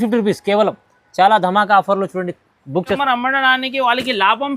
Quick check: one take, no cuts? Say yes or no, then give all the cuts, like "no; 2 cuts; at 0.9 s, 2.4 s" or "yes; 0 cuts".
no; 1 cut; at 3.0 s